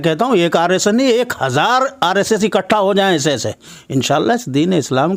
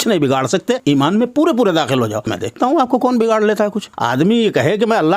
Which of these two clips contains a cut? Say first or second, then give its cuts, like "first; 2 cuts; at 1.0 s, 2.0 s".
second; 3 cuts; at 0.8 s, 2.4 s, 3.9 s